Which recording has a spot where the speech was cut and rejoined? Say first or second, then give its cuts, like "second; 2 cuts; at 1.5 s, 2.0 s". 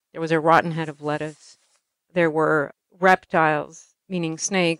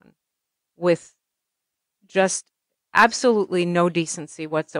first; 2 cuts; at 2.8 s, 3.9 s